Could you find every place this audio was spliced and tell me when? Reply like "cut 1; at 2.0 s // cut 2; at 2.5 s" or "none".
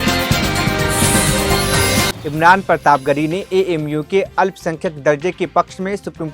cut 1; at 2.1 s